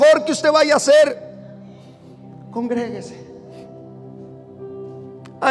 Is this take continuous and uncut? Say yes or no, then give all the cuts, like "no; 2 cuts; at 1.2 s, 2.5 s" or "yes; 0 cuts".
yes; 0 cuts